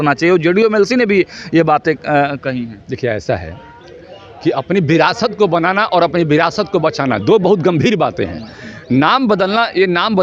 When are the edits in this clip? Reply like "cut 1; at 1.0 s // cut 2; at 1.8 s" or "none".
none